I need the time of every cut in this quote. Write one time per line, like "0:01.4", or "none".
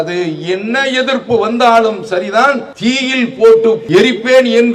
0:02.7
0:03.8